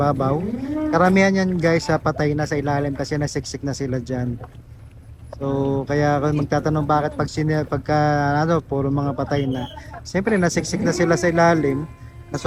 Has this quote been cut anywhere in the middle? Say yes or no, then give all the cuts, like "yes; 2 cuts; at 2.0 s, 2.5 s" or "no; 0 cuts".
no; 0 cuts